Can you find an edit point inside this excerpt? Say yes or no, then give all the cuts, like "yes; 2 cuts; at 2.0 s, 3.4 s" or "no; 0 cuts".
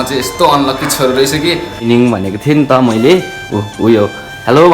yes; 1 cut; at 1.8 s